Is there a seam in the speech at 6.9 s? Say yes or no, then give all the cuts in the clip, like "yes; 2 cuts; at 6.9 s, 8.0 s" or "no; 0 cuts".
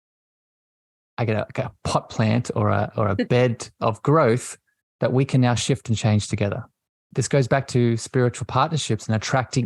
yes; 1 cut; at 6.9 s